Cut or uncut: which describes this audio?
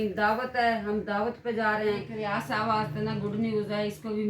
cut